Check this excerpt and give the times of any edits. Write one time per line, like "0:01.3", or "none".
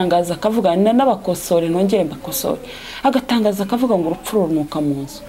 none